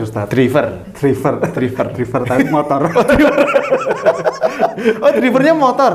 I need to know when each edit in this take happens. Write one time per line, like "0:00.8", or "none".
none